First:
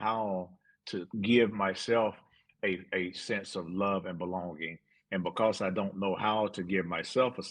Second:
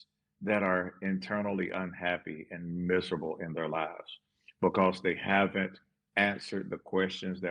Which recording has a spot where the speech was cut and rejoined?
first; 1 cut; at 1.1 s

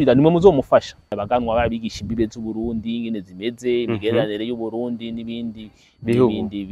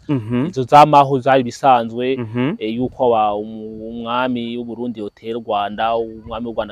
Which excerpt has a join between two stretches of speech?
first; 1 cut; at 1.1 s

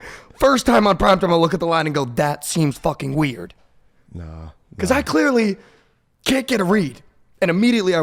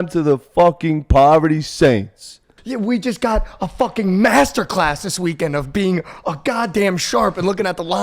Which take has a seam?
second; 1 cut; at 2.5 s

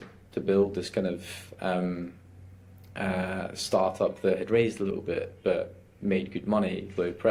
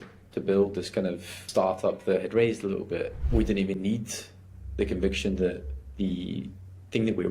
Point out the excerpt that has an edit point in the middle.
second; 2 cuts; at 1.4 s, 3.1 s

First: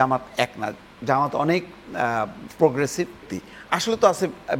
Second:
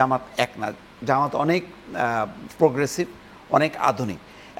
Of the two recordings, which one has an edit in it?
first; 1 cut; at 3.3 s

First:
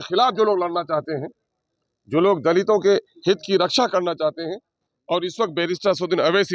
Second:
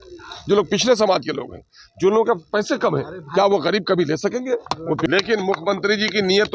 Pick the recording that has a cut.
second; 1 cut; at 5.1 s

